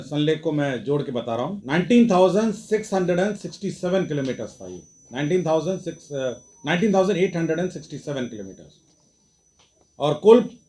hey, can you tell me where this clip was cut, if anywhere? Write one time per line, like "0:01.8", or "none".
0:01.6